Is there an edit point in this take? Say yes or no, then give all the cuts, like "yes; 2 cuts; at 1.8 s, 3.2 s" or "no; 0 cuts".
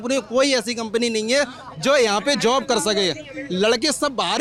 no; 0 cuts